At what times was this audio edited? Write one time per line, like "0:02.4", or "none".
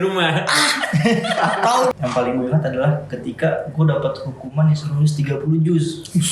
0:01.9